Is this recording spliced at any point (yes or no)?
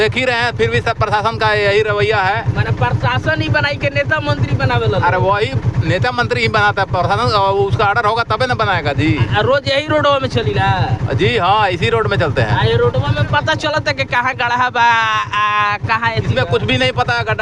no